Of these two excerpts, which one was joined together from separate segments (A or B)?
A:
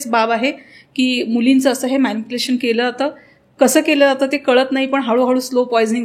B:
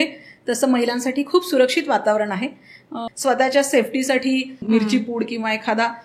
B